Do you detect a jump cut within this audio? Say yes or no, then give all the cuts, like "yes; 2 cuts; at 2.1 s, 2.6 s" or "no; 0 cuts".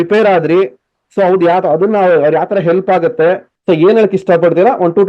yes; 1 cut; at 3.5 s